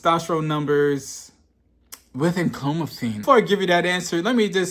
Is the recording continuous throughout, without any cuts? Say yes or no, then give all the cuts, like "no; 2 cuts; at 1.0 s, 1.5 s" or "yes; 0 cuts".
no; 1 cut; at 3.2 s